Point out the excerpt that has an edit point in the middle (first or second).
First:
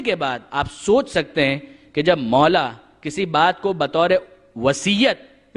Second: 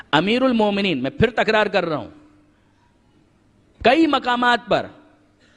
first